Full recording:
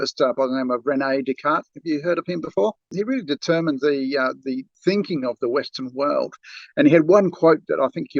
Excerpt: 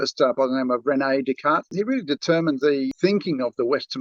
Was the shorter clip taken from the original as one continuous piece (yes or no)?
no